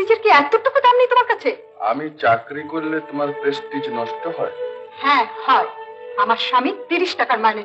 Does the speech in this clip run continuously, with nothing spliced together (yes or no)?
yes